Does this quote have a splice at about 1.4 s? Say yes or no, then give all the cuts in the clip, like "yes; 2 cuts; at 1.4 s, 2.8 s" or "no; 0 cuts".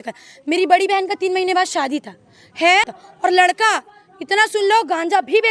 no; 1 cut; at 3.0 s